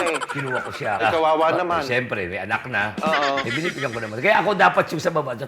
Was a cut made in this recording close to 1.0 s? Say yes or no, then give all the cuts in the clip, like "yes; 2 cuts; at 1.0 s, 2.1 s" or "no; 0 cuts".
yes; 1 cut; at 1.0 s